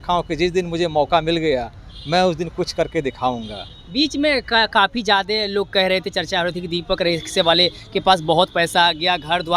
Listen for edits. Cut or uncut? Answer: uncut